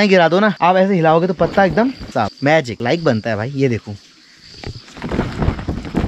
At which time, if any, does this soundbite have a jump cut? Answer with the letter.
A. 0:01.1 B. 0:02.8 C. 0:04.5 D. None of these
D